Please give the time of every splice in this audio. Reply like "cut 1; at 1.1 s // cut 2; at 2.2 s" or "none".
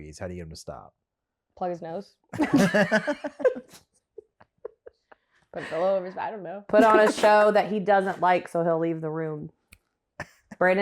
none